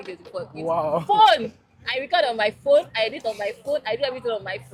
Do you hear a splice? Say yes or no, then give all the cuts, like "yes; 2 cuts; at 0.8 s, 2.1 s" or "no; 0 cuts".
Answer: no; 0 cuts